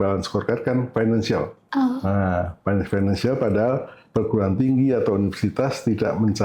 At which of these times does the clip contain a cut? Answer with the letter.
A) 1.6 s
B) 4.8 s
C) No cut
A